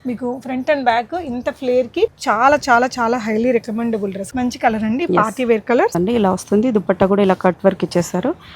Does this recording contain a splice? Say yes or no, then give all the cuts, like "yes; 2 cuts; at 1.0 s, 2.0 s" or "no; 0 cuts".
yes; 3 cuts; at 2.1 s, 4.3 s, 5.9 s